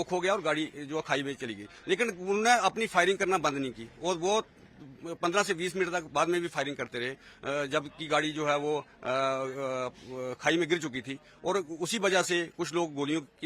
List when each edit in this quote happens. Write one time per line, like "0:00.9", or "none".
none